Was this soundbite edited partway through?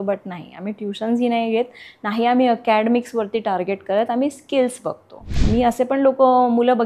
yes; 1 cut; at 5.3 s

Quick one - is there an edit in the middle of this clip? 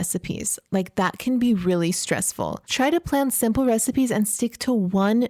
yes; 1 cut; at 2.6 s

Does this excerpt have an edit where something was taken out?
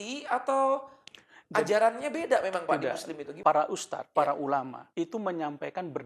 yes; 3 cuts; at 3.2 s, 4.0 s, 4.8 s

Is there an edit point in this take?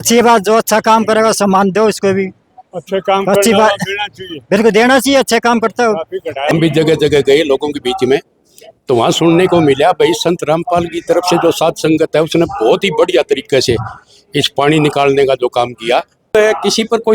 yes; 2 cuts; at 6.5 s, 16.3 s

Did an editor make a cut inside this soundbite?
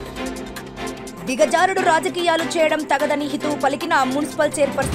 no; 0 cuts

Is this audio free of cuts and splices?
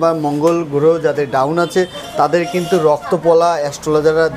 yes; 0 cuts

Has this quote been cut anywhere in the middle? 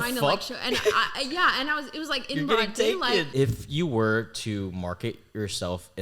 yes; 1 cut; at 3.3 s

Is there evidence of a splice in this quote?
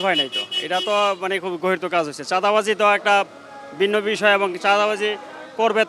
no; 0 cuts

